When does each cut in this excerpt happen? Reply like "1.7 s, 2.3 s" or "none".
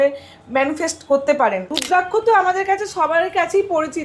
1.8 s